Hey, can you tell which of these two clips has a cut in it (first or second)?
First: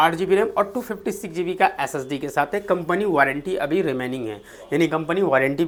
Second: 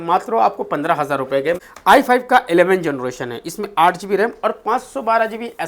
second